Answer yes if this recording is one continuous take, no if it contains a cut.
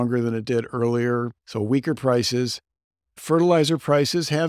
no